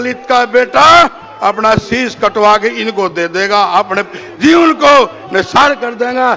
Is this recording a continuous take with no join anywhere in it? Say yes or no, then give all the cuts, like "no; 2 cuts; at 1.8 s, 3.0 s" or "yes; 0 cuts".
yes; 0 cuts